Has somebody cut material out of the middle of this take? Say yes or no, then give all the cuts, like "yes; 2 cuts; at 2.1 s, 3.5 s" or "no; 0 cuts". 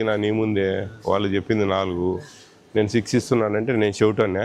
no; 0 cuts